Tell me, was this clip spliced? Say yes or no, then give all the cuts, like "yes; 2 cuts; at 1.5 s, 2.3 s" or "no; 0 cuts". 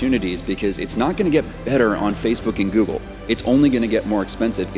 no; 0 cuts